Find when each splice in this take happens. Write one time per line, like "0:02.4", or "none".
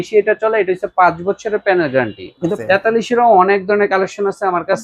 0:02.6